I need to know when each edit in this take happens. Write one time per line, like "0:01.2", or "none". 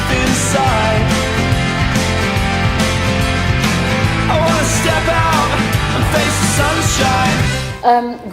0:01.4